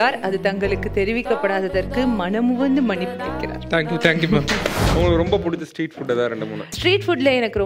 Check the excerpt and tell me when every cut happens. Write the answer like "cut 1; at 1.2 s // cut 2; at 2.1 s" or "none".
cut 1; at 4.9 s